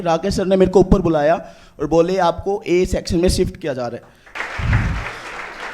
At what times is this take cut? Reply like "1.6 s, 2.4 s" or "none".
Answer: 4.3 s